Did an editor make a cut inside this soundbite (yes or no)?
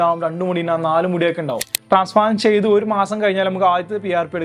yes